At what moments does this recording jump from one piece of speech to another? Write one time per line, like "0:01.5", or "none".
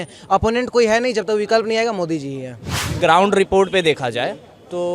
0:02.8